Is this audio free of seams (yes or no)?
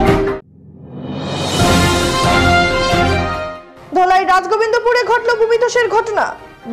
no